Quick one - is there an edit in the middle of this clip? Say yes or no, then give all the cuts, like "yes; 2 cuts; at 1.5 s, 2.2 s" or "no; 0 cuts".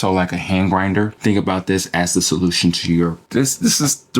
yes; 1 cut; at 3.2 s